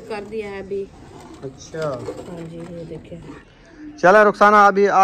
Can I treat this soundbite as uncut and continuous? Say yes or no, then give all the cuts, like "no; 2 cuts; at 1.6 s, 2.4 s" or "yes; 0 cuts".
no; 1 cut; at 3.4 s